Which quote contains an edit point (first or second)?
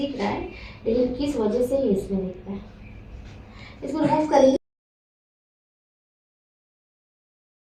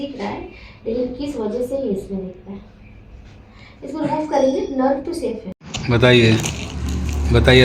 second